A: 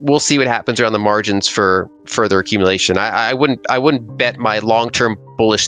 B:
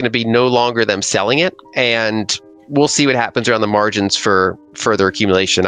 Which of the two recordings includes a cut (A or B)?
B